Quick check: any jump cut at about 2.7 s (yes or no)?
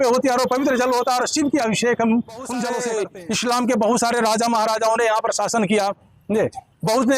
yes